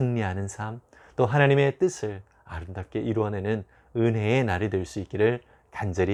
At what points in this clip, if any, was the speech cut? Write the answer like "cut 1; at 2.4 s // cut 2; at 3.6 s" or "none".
none